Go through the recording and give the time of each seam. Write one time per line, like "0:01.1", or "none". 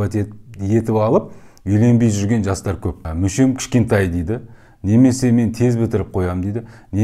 0:03.1